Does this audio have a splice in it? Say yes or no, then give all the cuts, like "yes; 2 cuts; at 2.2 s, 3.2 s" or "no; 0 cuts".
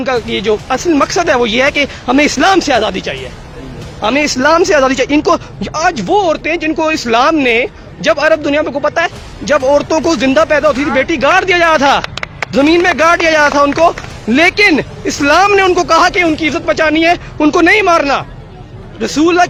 no; 0 cuts